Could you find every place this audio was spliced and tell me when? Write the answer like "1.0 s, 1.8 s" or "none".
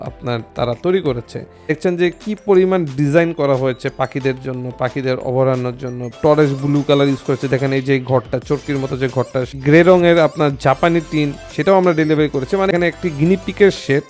1.8 s, 6.2 s, 9.6 s, 12.7 s